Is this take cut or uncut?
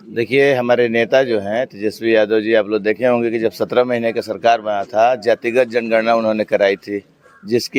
uncut